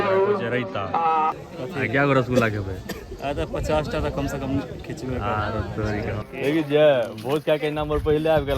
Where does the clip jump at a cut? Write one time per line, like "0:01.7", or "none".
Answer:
0:01.3
0:06.2